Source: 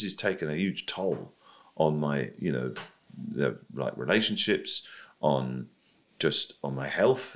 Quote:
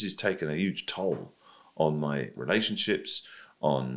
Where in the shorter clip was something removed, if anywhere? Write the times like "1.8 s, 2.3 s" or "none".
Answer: 2.4 s